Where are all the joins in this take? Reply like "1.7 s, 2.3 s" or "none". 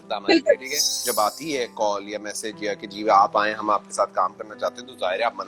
1.0 s